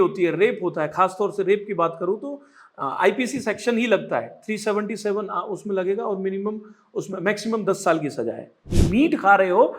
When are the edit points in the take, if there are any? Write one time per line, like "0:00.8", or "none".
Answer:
0:08.7